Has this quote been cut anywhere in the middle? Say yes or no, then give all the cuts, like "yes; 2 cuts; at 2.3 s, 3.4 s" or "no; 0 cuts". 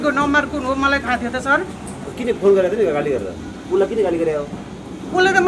no; 0 cuts